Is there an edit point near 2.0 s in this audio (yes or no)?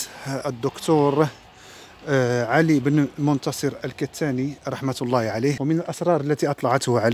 no